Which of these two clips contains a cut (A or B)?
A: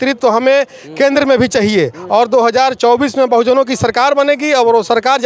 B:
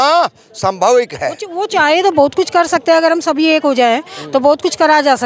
B